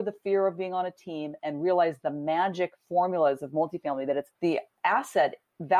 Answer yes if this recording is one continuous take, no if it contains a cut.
yes